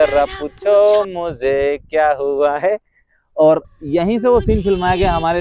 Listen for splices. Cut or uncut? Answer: uncut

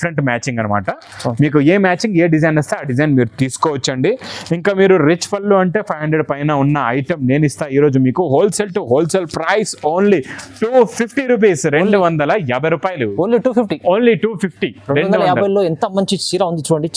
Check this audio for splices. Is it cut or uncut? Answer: uncut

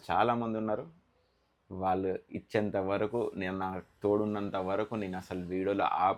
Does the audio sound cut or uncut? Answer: uncut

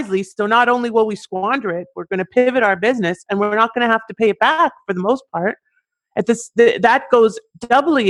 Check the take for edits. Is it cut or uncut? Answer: uncut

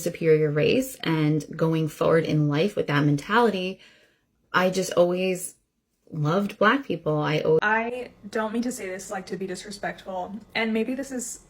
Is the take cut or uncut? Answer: cut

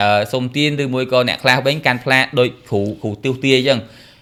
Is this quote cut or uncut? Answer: uncut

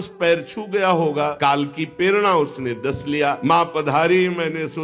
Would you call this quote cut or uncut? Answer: cut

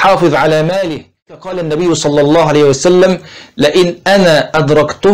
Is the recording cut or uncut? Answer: cut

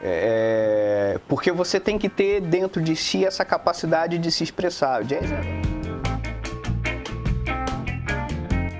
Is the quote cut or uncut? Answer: cut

